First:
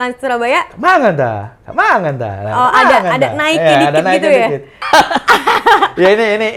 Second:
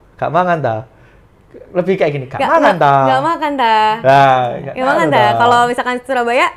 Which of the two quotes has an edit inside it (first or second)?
first